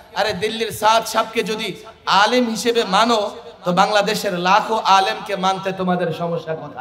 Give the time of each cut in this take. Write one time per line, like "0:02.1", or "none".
none

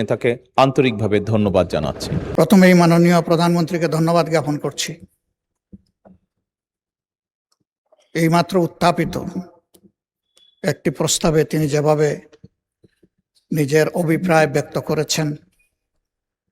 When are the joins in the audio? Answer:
0:02.3

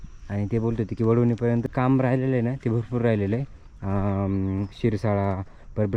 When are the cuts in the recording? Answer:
0:01.7

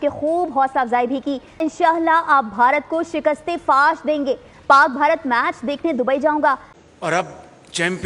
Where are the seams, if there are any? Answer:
0:01.6
0:06.7

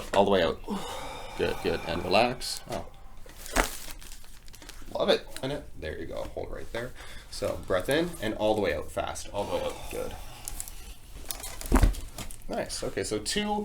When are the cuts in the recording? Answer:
0:05.4

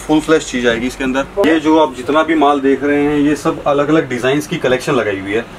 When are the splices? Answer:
0:01.4

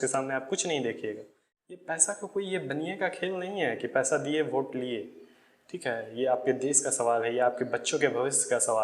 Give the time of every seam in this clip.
0:01.8

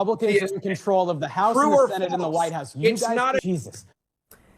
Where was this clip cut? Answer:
0:03.4

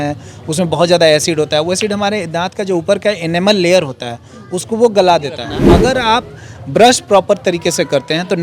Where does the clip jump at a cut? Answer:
0:05.6

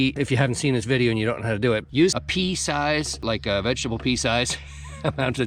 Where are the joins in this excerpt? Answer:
0:01.9

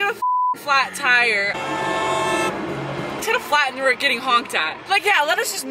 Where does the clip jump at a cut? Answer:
0:01.5
0:03.3

